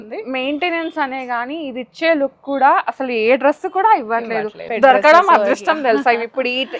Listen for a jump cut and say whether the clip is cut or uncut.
cut